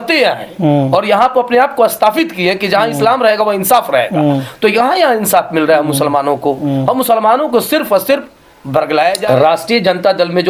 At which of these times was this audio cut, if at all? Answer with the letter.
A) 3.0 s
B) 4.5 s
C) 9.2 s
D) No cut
C